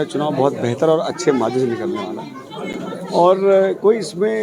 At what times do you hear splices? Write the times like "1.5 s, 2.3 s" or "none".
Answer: none